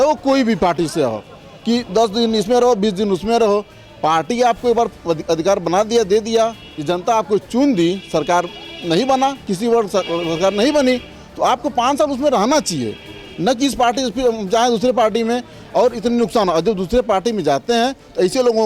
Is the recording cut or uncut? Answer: uncut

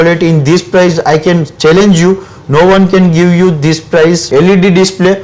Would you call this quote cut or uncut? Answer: cut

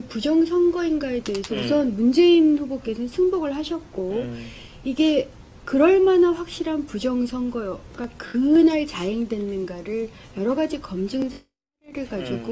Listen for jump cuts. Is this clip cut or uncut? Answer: cut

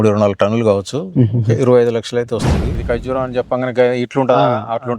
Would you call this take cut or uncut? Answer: cut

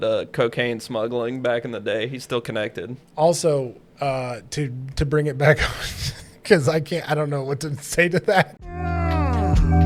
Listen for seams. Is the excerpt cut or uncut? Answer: cut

